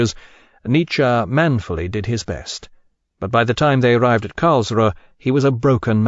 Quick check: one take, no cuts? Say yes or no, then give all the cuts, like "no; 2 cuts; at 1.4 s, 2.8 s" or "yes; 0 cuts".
no; 1 cut; at 4.9 s